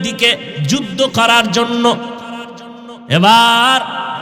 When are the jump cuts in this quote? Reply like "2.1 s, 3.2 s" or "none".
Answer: none